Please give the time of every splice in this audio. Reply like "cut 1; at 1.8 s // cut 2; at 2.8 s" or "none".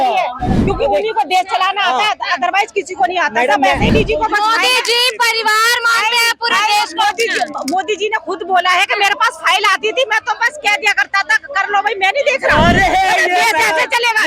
cut 1; at 3.9 s

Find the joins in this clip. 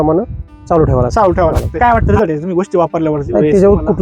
cut 1; at 1.7 s

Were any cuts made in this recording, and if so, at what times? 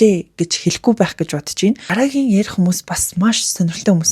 cut 1; at 1.9 s

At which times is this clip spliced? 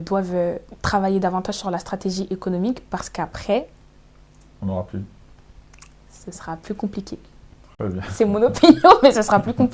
none

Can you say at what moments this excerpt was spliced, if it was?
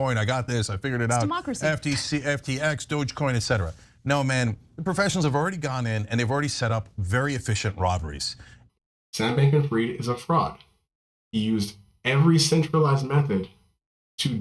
cut 1; at 8.5 s

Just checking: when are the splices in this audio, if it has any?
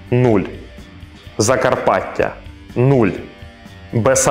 none

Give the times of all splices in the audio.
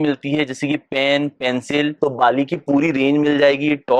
cut 1; at 2.0 s

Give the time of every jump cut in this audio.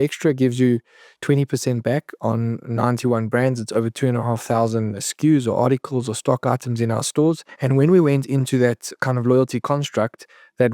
cut 1; at 5.0 s // cut 2; at 7.5 s // cut 3; at 8.9 s

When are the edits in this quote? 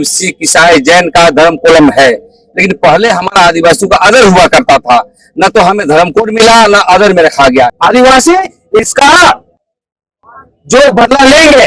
cut 1; at 7.8 s

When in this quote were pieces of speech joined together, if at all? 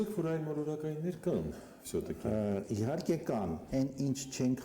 cut 1; at 3.6 s

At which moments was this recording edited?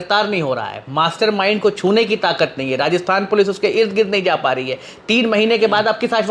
none

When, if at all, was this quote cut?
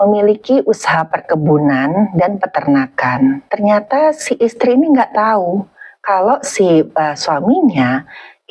cut 1; at 3.5 s

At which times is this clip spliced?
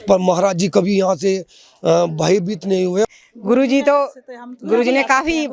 cut 1; at 3.0 s

